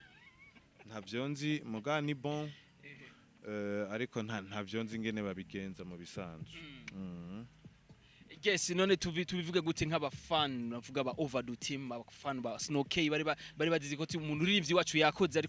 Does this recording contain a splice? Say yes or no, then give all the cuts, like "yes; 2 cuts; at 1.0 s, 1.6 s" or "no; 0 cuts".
no; 0 cuts